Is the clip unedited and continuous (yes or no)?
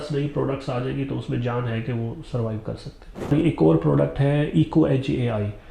no